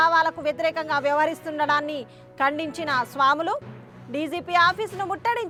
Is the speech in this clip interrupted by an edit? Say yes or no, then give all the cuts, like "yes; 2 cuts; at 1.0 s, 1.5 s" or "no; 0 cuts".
no; 0 cuts